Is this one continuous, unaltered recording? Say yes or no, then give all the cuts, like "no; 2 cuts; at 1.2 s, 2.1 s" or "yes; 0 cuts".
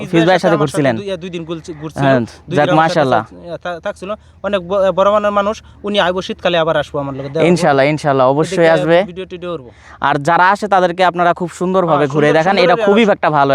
yes; 0 cuts